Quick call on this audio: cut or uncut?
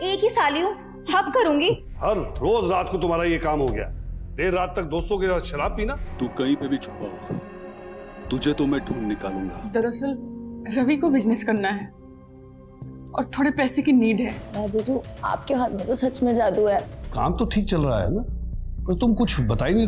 cut